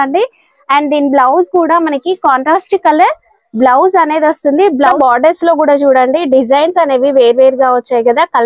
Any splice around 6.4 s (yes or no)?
no